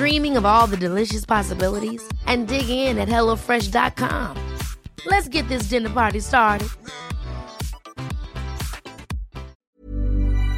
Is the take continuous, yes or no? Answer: no